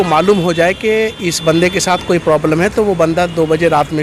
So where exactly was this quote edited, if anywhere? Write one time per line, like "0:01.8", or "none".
none